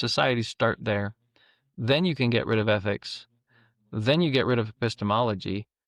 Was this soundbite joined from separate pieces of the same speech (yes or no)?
no